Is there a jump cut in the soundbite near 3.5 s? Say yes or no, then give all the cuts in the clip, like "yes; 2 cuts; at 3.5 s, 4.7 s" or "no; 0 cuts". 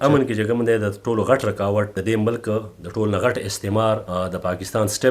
no; 1 cut; at 1.9 s